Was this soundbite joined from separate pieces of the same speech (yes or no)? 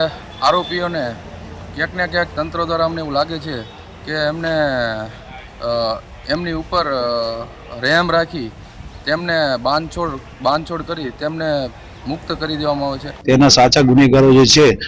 yes